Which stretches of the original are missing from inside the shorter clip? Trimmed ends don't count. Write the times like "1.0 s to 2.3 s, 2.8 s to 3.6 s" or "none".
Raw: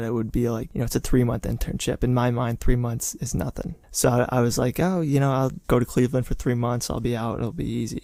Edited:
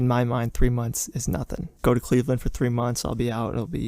3.8 s to 5.6 s